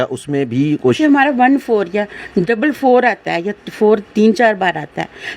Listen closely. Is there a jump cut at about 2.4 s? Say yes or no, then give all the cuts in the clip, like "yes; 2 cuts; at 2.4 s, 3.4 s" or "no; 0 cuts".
no; 1 cut; at 1.0 s